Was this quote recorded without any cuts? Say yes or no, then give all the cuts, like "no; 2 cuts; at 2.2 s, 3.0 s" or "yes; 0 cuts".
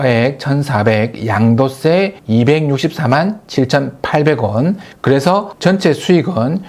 yes; 0 cuts